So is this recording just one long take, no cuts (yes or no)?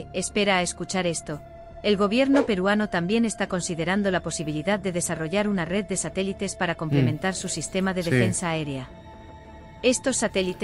no